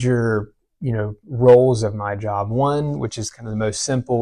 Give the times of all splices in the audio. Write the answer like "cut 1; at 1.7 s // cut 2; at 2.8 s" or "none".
none